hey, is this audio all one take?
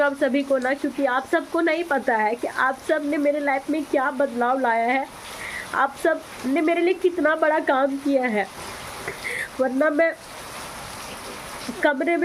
yes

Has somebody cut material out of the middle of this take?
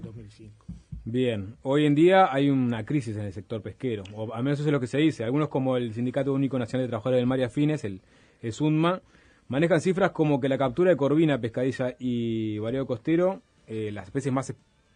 no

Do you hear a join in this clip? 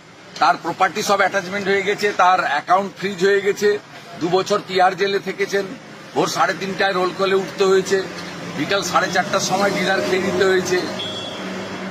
no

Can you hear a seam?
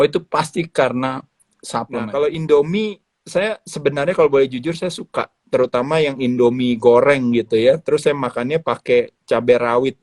yes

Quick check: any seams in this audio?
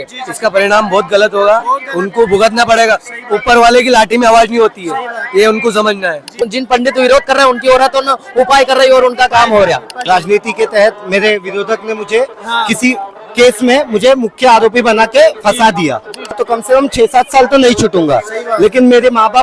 yes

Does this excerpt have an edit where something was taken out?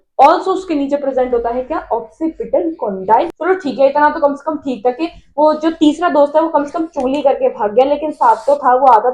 yes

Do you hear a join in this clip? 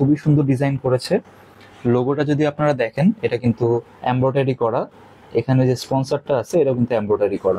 no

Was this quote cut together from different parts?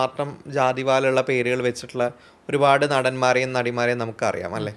no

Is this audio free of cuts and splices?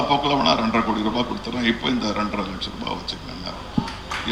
yes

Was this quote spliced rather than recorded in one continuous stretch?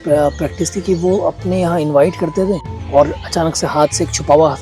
yes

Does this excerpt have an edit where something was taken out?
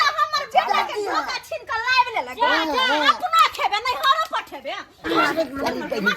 yes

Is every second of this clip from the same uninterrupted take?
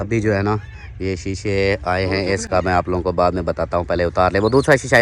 yes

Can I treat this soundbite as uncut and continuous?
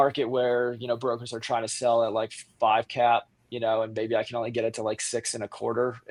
yes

